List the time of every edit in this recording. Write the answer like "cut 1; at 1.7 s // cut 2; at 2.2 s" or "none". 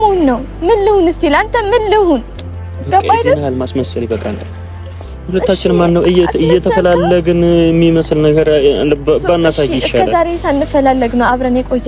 none